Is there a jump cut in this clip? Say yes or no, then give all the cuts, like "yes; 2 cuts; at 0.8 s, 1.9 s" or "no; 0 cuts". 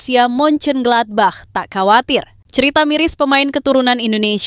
yes; 1 cut; at 2.4 s